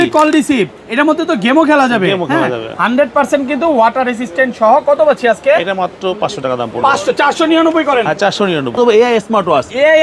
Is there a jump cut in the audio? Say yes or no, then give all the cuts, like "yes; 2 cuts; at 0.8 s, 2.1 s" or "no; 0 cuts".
yes; 1 cut; at 8.7 s